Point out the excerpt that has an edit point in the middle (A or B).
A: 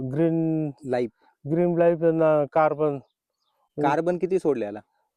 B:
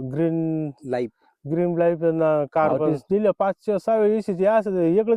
B